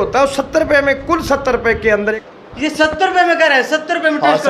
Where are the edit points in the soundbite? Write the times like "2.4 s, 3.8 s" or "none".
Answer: 2.2 s